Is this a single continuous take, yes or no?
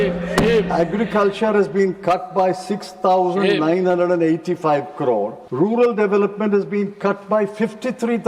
no